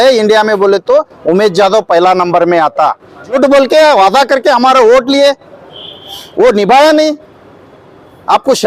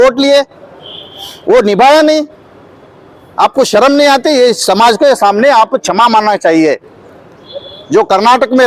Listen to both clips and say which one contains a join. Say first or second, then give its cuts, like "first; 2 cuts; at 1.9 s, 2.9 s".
first; 1 cut; at 3.3 s